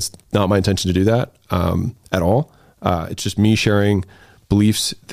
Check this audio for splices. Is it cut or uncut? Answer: uncut